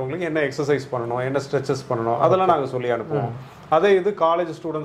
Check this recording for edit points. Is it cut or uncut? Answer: uncut